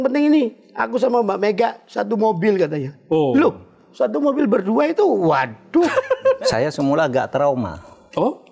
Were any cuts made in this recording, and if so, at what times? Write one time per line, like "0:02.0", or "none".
0:06.5